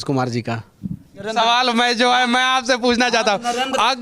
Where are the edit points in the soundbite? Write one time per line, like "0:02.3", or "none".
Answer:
0:01.3